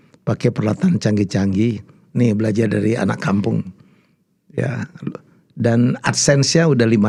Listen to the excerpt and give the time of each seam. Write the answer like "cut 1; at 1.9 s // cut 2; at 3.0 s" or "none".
none